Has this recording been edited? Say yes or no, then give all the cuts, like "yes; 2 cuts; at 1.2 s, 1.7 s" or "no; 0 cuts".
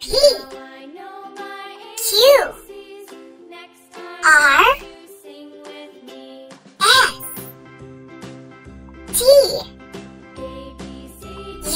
no; 0 cuts